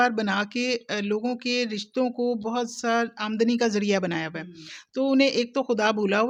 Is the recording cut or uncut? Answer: uncut